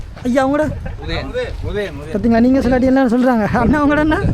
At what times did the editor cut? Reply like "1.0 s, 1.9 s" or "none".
none